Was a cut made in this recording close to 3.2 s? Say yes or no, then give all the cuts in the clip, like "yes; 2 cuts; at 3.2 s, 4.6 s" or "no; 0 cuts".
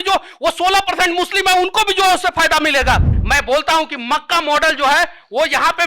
yes; 1 cut; at 3.2 s